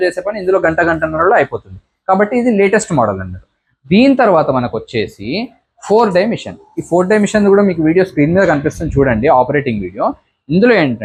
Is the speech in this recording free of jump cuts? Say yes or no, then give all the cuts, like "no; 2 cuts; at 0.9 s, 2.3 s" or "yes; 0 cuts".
yes; 0 cuts